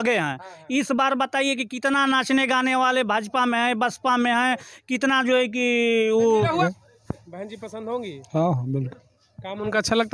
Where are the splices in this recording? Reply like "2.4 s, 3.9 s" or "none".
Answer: 6.6 s